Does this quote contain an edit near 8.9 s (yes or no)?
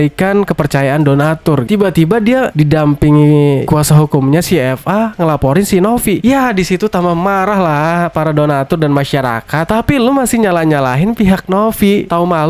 no